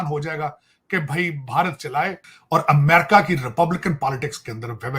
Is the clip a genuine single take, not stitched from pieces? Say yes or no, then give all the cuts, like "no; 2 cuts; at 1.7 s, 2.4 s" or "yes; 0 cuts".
no; 1 cut; at 2.3 s